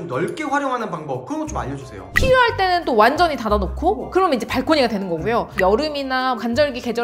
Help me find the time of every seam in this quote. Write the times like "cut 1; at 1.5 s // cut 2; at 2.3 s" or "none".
cut 1; at 2.1 s